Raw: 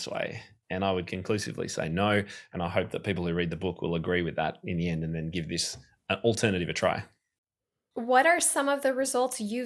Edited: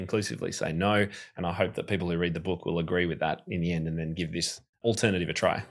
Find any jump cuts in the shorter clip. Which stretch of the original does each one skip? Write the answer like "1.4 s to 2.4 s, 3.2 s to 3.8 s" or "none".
6.0 s to 6.2 s